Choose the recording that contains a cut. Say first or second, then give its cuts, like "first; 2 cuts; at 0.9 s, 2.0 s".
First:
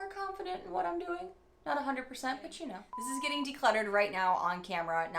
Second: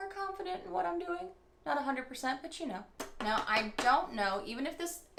first; 1 cut; at 2.9 s